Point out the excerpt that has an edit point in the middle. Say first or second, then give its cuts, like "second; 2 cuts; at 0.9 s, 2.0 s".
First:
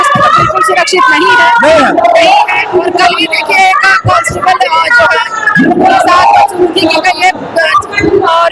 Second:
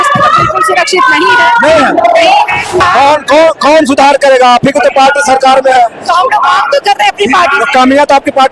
second; 1 cut; at 2.8 s